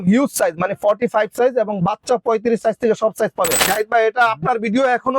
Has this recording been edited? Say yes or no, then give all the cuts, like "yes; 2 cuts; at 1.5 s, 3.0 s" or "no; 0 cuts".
yes; 1 cut; at 3.7 s